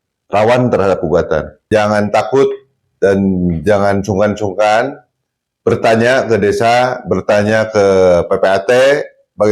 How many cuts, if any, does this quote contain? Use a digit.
1